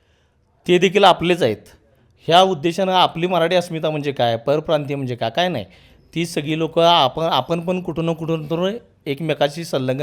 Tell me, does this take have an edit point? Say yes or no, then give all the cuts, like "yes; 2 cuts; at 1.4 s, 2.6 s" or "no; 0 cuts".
no; 0 cuts